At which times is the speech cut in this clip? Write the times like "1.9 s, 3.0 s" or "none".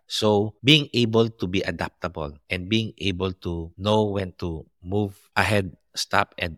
none